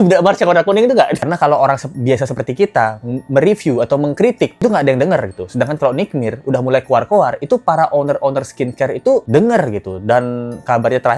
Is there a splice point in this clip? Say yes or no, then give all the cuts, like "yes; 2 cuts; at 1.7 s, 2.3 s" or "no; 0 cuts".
yes; 2 cuts; at 1.2 s, 4.5 s